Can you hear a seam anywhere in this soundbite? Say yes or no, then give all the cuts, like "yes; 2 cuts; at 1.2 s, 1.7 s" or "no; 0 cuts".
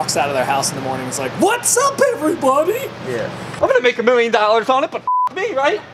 yes; 1 cut; at 3.5 s